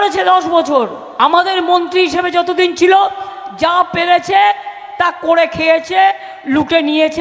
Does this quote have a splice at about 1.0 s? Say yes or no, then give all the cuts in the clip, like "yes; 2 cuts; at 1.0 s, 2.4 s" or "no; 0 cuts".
yes; 1 cut; at 1.0 s